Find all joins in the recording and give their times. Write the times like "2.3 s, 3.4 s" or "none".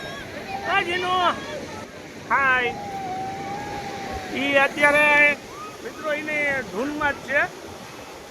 1.9 s